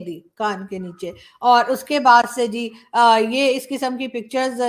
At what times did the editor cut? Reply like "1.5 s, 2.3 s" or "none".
none